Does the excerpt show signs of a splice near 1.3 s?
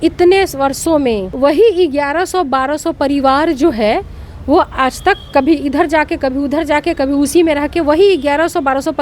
yes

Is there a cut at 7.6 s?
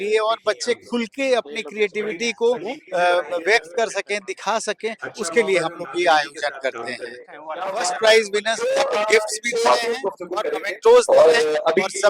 yes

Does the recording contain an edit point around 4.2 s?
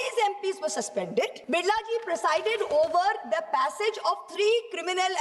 no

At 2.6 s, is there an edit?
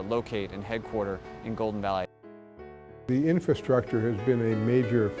yes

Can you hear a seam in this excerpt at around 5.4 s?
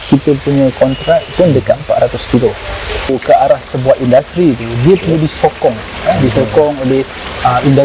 no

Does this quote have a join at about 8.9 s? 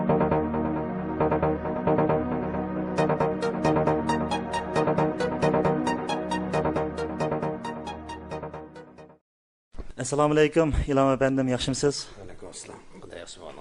no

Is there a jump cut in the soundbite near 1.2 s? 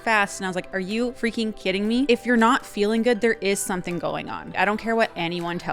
yes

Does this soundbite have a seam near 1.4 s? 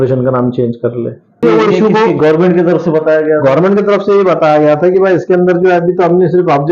yes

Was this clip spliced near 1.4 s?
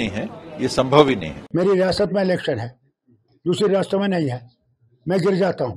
yes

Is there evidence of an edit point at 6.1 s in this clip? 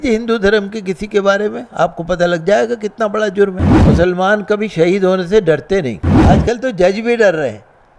yes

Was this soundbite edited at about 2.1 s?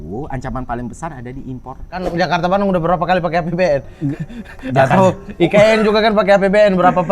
yes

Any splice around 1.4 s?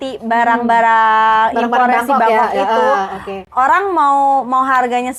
no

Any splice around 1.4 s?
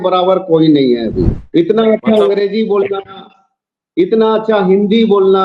yes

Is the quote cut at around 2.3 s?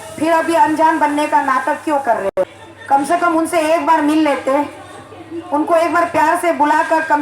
yes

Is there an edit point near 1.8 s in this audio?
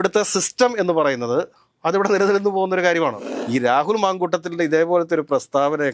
no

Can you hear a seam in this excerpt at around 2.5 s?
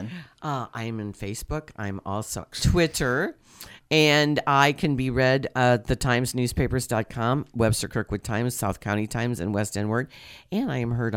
yes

